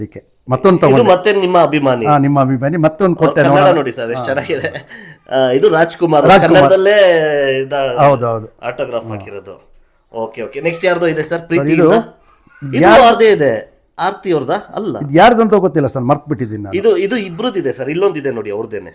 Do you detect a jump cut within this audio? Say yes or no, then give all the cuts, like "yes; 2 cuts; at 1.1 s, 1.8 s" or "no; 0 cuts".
no; 0 cuts